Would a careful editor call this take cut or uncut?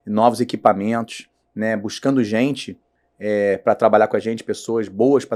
uncut